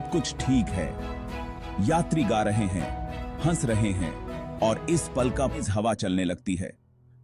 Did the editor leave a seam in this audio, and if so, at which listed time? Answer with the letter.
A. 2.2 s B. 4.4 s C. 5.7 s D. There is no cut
C